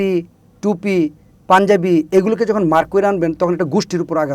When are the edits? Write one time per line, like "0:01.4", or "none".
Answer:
none